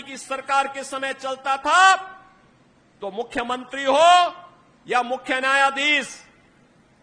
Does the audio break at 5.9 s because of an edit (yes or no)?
no